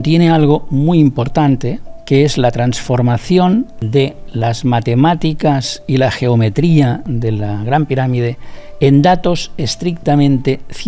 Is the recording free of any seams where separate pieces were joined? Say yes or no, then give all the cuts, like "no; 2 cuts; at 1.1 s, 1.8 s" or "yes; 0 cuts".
no; 2 cuts; at 3.8 s, 7.1 s